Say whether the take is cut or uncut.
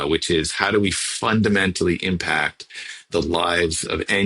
uncut